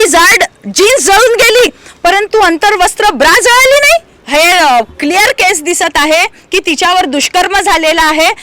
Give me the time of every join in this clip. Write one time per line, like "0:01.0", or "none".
0:04.2